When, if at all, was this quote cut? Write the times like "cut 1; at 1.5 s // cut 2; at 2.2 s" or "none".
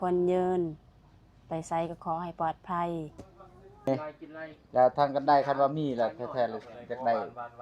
cut 1; at 3.8 s